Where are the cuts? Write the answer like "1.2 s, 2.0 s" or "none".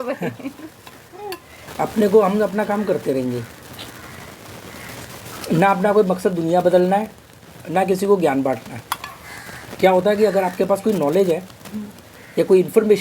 1.6 s